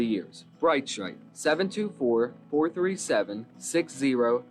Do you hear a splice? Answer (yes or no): no